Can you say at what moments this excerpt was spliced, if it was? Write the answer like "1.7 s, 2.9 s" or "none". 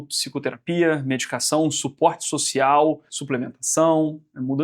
3.1 s